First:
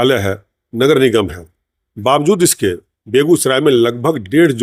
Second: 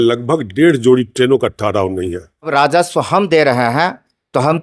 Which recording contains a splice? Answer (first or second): second